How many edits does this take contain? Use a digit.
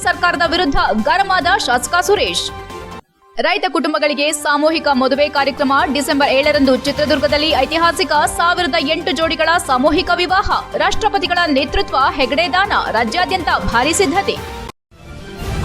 1